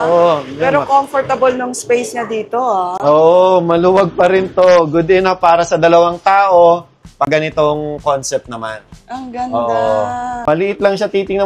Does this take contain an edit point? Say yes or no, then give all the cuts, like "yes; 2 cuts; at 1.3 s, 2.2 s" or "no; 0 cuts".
no; 0 cuts